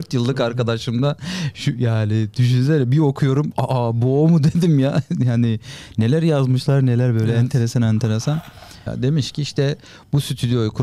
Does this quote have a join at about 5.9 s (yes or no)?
no